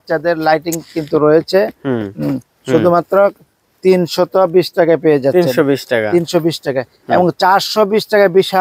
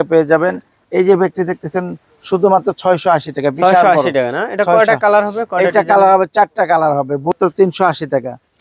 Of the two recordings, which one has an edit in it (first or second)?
second